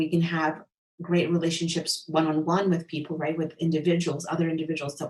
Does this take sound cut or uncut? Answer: uncut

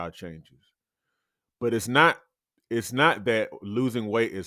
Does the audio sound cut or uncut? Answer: uncut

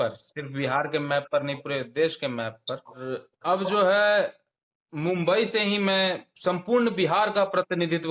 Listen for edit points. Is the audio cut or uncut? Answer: cut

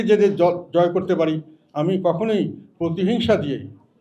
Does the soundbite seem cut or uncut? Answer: uncut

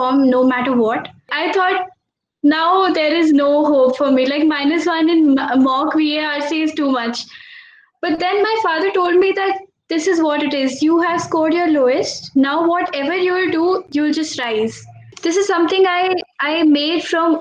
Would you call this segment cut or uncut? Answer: cut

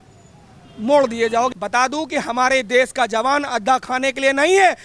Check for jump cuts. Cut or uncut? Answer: cut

